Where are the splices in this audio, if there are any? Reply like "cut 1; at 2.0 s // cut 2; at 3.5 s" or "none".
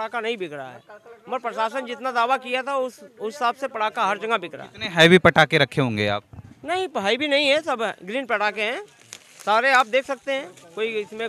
none